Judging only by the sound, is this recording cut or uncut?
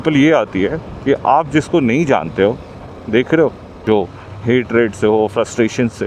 cut